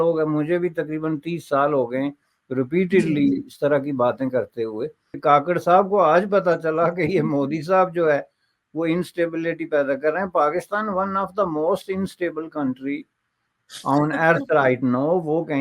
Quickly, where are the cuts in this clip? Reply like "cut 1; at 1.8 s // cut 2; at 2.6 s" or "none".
cut 1; at 5.1 s

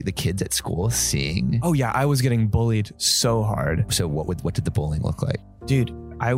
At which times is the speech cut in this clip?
cut 1; at 3.8 s // cut 2; at 5.5 s

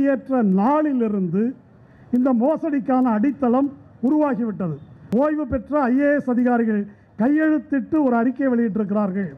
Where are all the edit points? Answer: cut 1; at 4.9 s

